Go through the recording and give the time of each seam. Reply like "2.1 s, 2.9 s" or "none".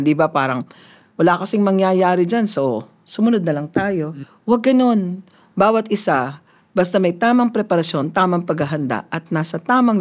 4.1 s